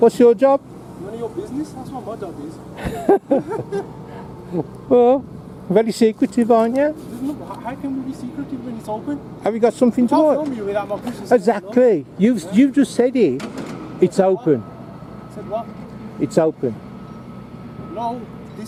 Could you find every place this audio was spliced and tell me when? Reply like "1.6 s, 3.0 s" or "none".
none